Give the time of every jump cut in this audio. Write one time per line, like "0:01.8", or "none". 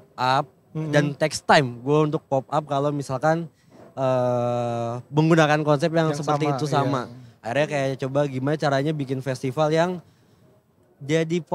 none